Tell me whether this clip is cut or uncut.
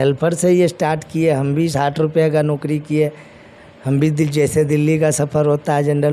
uncut